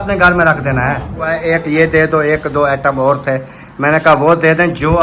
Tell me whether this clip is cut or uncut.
cut